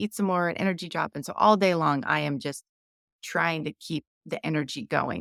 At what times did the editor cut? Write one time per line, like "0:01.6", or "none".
none